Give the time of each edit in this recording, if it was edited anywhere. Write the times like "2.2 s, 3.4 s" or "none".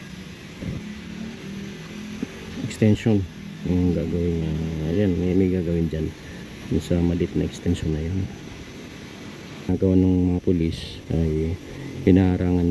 9.7 s

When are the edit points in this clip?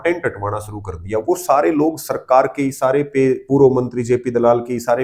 none

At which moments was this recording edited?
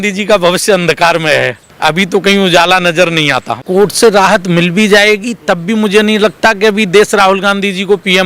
1.6 s, 3.6 s

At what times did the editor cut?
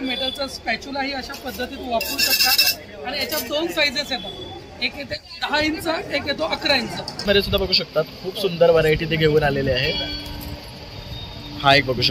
7.2 s

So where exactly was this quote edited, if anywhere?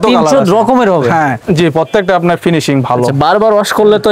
1.4 s

